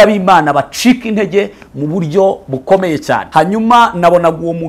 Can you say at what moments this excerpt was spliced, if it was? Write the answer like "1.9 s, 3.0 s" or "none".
3.2 s